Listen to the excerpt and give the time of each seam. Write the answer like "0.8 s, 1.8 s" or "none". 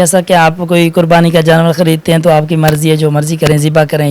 none